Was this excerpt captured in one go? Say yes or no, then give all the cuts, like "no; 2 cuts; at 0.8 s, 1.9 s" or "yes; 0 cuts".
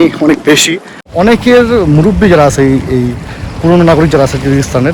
no; 1 cut; at 1.1 s